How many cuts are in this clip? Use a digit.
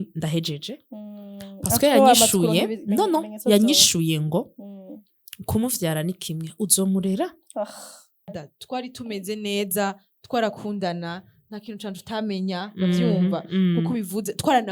1